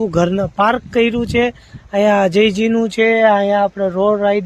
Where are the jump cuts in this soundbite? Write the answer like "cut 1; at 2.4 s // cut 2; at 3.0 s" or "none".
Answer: none